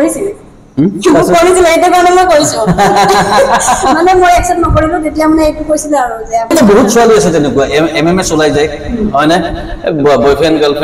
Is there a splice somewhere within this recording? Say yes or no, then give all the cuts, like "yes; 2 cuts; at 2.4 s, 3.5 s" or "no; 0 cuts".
yes; 1 cut; at 6.5 s